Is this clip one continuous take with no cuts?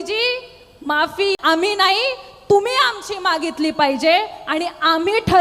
no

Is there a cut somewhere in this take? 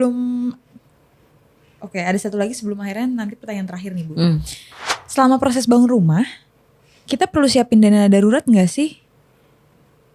no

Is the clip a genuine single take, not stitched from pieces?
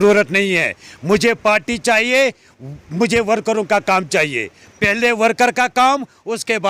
yes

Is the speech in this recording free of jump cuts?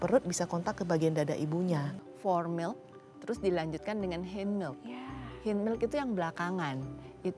no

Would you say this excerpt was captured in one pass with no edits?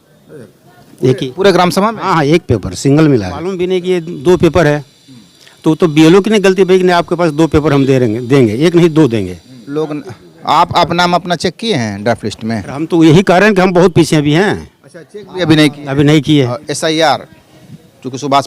no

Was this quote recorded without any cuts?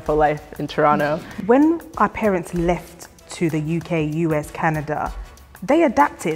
no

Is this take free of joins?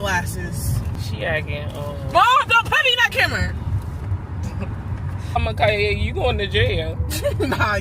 no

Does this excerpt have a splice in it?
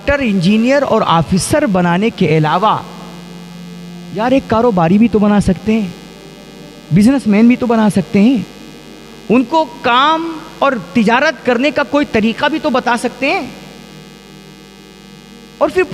no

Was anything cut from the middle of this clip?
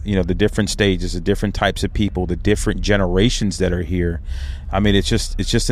no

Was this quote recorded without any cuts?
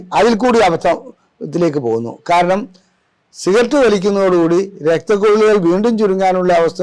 yes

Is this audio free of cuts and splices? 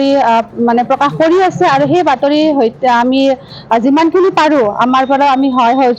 yes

